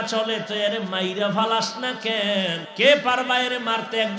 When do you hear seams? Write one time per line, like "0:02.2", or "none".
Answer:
0:02.6